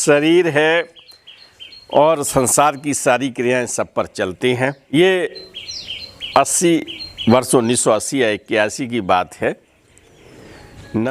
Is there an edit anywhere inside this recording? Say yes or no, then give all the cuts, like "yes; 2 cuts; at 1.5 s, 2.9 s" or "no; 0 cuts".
yes; 1 cut; at 4.9 s